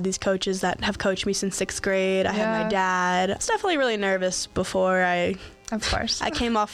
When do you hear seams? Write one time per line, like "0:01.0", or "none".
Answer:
0:03.4